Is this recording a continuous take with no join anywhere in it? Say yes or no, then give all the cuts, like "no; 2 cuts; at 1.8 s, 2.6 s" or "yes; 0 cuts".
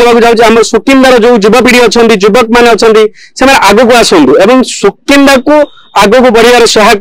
yes; 0 cuts